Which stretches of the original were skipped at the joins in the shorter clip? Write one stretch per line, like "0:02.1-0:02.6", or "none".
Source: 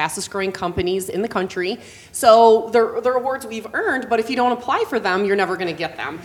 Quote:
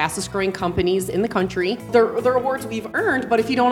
0:01.9-0:02.7